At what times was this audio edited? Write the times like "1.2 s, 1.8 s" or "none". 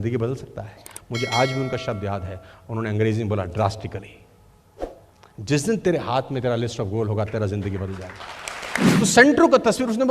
8.9 s